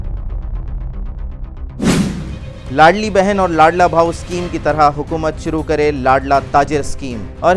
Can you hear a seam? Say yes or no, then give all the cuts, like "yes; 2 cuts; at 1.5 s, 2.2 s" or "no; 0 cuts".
yes; 1 cut; at 2.0 s